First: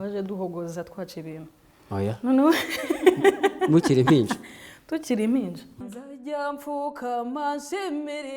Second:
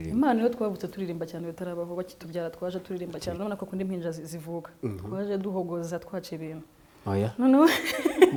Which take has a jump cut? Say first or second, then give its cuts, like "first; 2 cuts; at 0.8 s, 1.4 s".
first; 1 cut; at 5.7 s